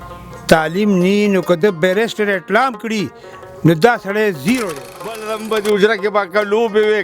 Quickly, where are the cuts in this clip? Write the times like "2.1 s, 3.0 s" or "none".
5.4 s

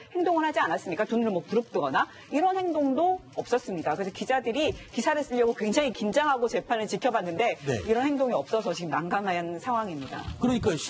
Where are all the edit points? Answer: none

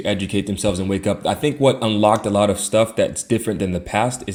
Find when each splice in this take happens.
none

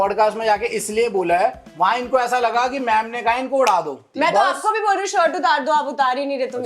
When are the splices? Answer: 1.6 s, 4.0 s

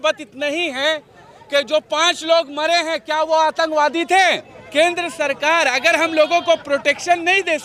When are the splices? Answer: 4.5 s

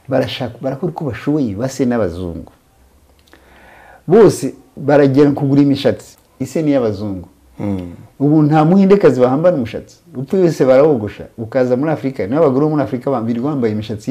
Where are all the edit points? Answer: 6.1 s

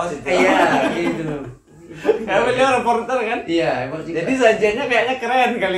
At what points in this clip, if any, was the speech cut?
none

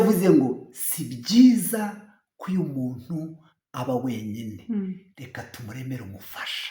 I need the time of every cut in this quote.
none

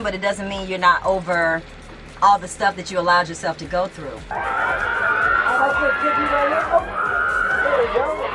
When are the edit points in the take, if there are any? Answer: none

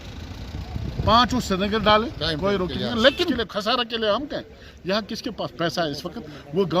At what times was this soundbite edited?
3.4 s

